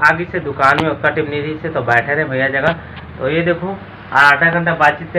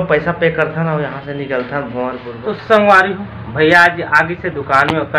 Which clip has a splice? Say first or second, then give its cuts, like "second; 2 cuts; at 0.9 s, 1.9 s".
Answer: second; 1 cut; at 2.3 s